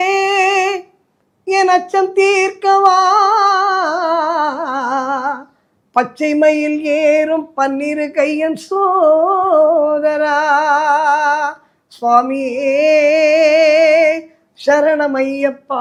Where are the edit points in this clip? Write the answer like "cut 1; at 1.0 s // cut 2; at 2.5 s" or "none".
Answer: none